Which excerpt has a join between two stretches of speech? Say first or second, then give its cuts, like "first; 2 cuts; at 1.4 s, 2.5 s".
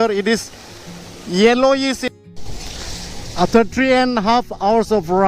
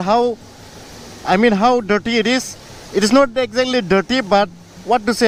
first; 1 cut; at 2.1 s